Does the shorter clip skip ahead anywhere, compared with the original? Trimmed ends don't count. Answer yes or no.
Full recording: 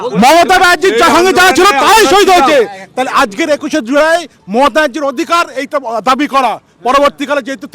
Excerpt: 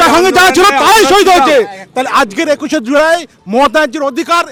no